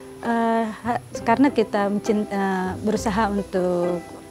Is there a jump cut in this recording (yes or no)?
no